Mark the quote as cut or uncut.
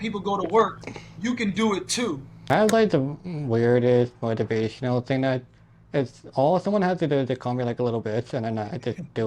cut